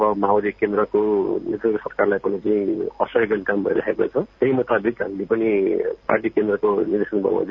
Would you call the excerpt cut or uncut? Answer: cut